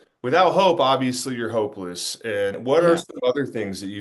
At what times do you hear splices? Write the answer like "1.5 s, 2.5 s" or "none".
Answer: 2.6 s